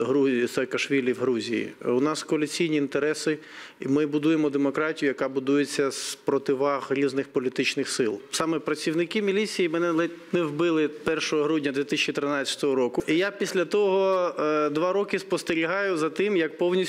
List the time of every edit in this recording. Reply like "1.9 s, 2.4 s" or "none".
8.2 s, 13.0 s